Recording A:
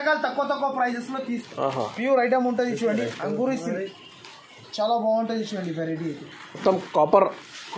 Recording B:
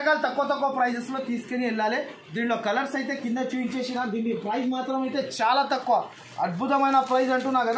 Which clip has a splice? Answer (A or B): A